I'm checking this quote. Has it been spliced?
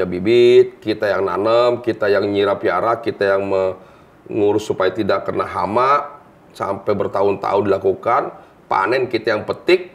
no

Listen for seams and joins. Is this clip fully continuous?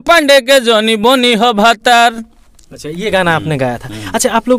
yes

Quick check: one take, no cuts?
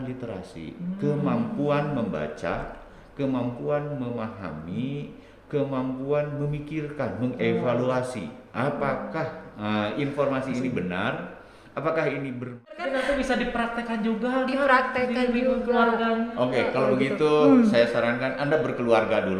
no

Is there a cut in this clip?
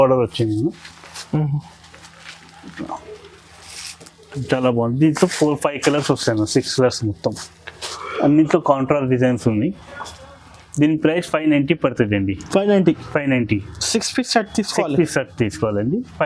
no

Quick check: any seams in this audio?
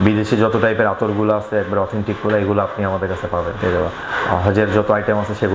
no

